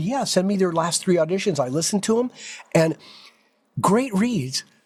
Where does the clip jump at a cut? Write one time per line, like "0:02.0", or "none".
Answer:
none